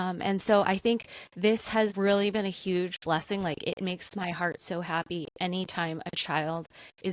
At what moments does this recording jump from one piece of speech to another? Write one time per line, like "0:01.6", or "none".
0:01.9